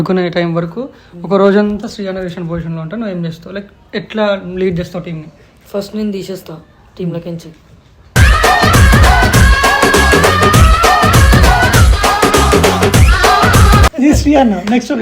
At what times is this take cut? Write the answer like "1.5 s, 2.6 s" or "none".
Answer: 13.9 s